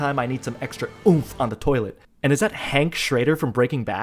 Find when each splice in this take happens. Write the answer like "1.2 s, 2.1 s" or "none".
2.0 s